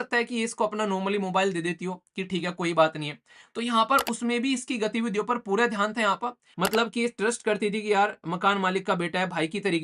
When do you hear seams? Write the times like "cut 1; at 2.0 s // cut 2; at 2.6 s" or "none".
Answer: cut 1; at 6.4 s